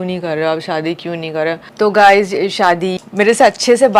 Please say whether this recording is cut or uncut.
cut